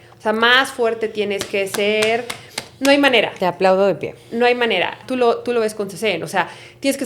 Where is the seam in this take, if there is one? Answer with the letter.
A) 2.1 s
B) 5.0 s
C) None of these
B